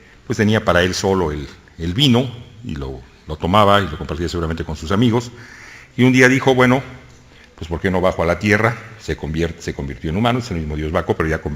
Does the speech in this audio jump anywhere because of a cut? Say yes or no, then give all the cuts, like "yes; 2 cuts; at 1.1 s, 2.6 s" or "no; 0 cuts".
yes; 1 cut; at 1.0 s